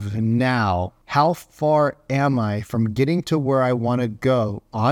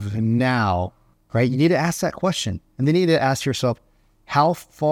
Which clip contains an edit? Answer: first; 1 cut; at 1.0 s

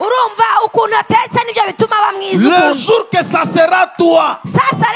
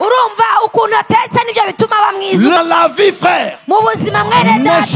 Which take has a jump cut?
second; 1 cut; at 2.6 s

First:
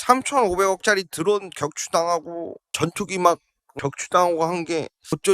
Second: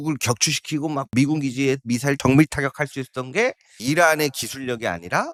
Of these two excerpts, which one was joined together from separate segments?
first; 1 cut; at 2.6 s

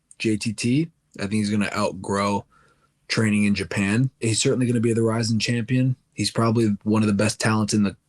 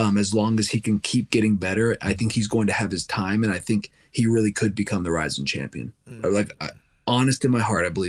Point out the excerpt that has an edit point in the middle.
first; 2 cuts; at 4.1 s, 6.1 s

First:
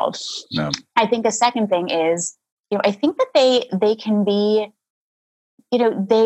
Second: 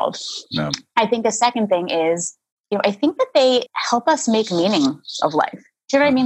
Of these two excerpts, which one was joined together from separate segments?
second; 1 cut; at 3.7 s

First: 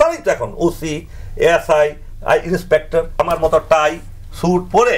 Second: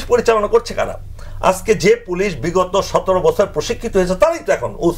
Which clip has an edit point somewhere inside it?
first; 1 cut; at 3.1 s

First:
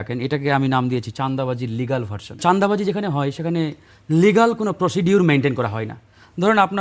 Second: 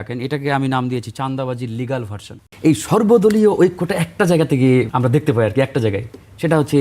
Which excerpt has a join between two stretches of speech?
second; 2 cuts; at 2.3 s, 4.9 s

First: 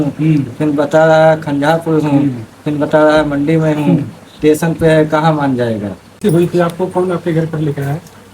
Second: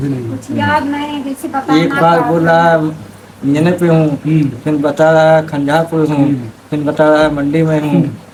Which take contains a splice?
first; 1 cut; at 6.2 s

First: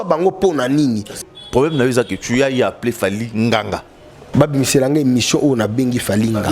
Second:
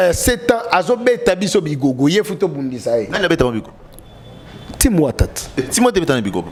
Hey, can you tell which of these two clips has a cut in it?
first; 2 cuts; at 1.2 s, 4.2 s

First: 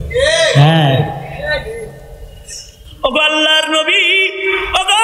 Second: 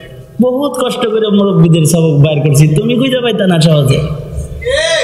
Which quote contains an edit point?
first; 1 cut; at 2.8 s

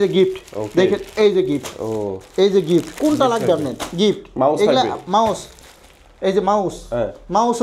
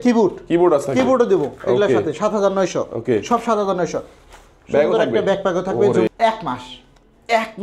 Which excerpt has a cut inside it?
second; 1 cut; at 6.1 s

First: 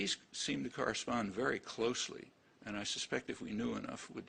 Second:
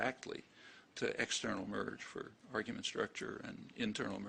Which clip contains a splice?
second; 1 cut; at 3.2 s

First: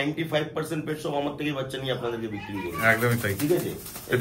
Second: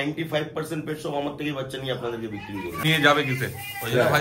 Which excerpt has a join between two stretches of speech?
second; 1 cut; at 2.8 s

